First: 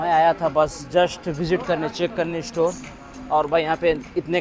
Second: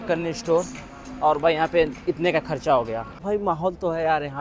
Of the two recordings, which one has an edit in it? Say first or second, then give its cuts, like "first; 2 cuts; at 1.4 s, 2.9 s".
second; 1 cut; at 3.4 s